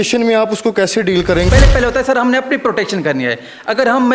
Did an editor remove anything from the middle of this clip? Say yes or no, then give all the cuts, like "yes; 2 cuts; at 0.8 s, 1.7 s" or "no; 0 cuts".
yes; 1 cut; at 1.5 s